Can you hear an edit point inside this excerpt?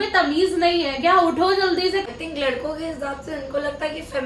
yes; 1 cut; at 2.0 s

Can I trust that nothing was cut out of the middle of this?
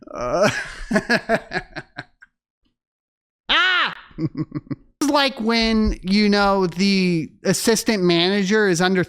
no; 1 cut; at 5.0 s

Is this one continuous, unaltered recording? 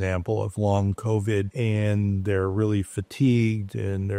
yes; 0 cuts

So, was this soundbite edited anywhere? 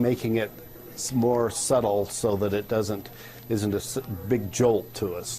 yes; 1 cut; at 1.9 s

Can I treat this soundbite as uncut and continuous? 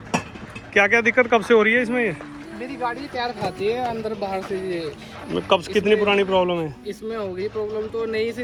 yes; 0 cuts

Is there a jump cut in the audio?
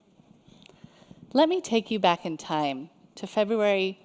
no; 0 cuts

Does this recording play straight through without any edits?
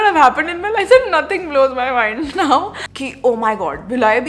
no; 1 cut; at 2.9 s

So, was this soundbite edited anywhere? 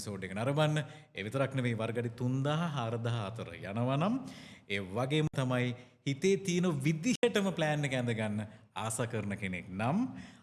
no; 0 cuts

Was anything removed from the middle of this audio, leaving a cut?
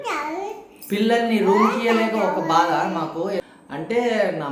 yes; 1 cut; at 3.5 s

